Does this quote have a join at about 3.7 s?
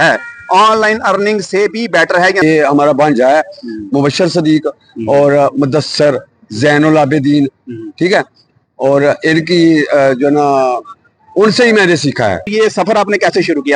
no; 2 cuts; at 2.4 s, 12.5 s

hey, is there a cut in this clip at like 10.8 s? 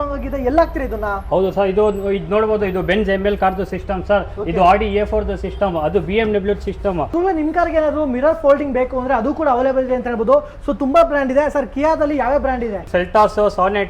no; 2 cuts; at 7.0 s, 12.9 s

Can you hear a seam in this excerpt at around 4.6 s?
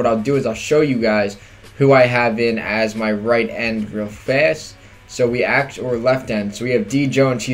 yes; 1 cut; at 4.6 s

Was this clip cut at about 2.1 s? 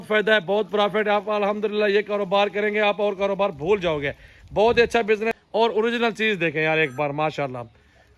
no; 1 cut; at 5.3 s

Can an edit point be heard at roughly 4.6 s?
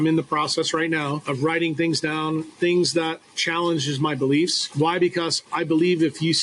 yes; 3 cuts; at 1.2 s, 4.6 s, 5.4 s

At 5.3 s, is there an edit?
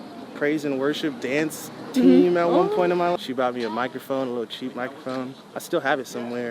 no; 1 cut; at 3.1 s

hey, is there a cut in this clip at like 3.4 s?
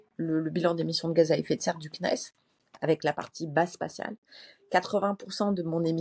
no; 0 cuts

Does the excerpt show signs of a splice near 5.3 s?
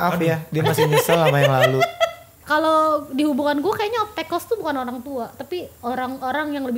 no; 1 cut; at 2.4 s

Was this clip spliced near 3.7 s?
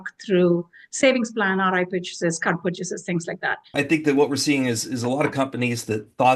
yes; 1 cut; at 3.7 s

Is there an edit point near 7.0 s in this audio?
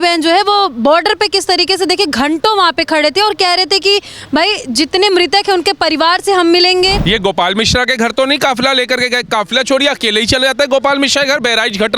yes; 1 cut; at 7.0 s

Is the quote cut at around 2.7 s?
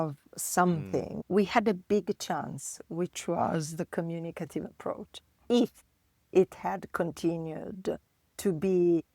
no; 1 cut; at 1.2 s

